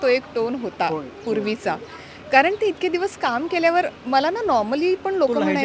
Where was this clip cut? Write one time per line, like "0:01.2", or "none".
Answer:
none